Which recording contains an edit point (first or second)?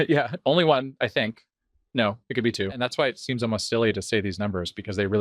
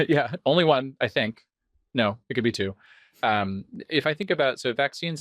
first